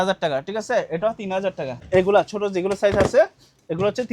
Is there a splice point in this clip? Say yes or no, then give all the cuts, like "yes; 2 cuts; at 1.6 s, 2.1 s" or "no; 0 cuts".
yes; 1 cut; at 1.9 s